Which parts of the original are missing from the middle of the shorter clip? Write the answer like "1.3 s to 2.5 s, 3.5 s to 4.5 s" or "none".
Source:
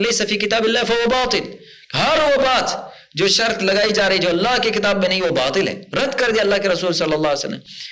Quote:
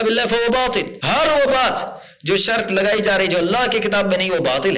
1.5 s to 1.8 s